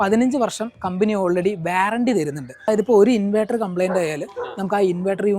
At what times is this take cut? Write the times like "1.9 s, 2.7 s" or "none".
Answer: 2.7 s